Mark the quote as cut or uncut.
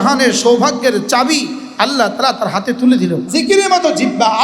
cut